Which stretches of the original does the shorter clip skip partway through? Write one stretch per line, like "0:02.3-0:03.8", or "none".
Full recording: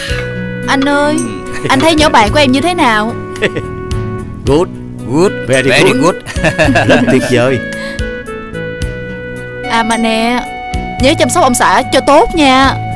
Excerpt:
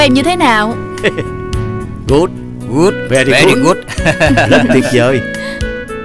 none